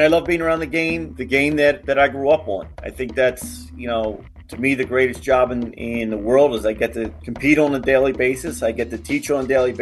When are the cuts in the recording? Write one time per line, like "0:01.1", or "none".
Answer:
none